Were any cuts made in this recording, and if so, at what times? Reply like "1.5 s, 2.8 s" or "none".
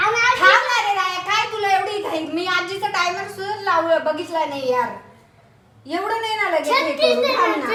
none